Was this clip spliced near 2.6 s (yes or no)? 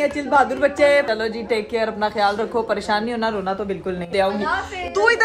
no